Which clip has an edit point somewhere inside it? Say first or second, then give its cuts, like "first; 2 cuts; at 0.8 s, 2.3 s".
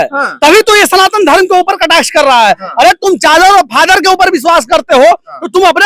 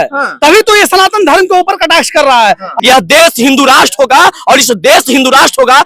second; 1 cut; at 2.7 s